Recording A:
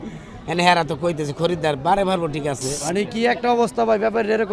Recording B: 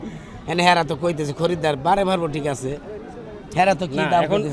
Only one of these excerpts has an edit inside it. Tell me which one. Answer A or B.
A